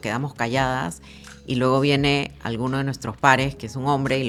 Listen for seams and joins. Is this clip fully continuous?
yes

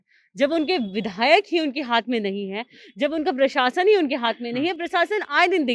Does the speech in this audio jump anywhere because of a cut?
no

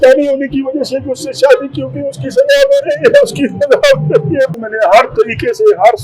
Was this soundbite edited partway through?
yes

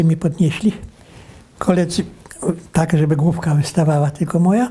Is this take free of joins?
yes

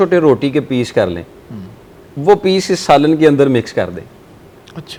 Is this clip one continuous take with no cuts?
yes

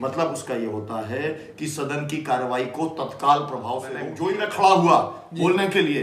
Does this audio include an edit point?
yes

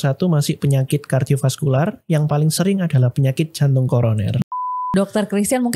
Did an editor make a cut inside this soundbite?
yes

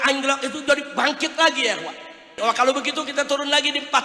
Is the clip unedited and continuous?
no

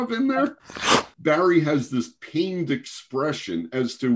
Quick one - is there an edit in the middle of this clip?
yes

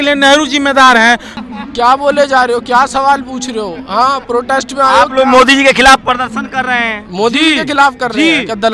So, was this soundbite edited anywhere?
yes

